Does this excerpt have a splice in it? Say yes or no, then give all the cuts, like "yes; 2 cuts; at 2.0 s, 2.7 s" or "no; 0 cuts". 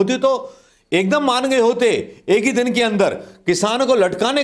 no; 0 cuts